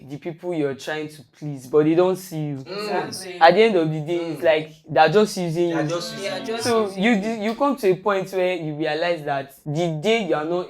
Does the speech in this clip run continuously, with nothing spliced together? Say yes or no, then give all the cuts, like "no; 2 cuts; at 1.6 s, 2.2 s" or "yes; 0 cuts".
no; 1 cut; at 9.6 s